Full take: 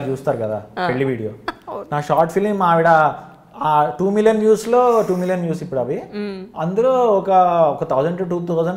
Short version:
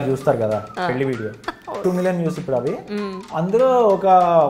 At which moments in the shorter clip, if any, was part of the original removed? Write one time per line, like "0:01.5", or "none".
0:01.8